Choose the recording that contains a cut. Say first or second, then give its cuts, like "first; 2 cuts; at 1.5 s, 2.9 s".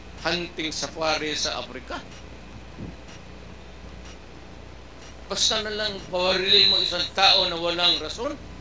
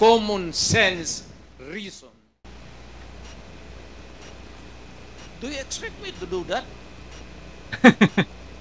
second; 1 cut; at 2.4 s